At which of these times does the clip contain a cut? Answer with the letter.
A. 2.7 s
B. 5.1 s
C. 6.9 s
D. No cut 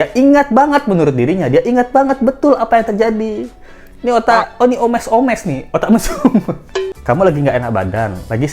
C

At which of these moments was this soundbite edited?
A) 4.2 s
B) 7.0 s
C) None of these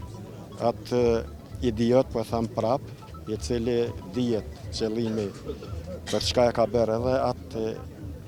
C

